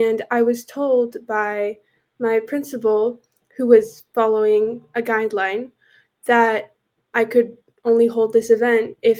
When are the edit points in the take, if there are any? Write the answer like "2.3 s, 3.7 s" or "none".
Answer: 7.0 s